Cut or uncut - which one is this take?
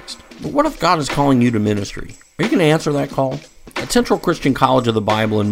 uncut